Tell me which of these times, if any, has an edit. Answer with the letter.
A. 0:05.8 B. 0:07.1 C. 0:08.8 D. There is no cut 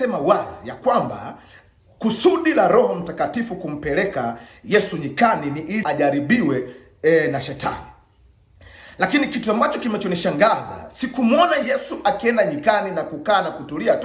A